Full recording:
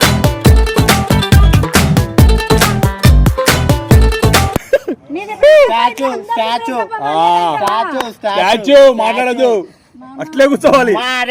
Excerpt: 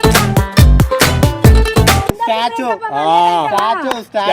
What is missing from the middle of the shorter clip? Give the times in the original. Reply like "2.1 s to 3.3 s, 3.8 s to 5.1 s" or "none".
4.6 s to 6.2 s